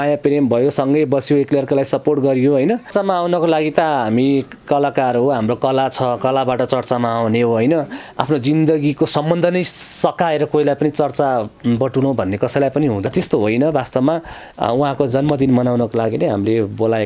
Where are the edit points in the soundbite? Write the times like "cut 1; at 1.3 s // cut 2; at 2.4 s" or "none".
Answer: cut 1; at 2.9 s // cut 2; at 13.1 s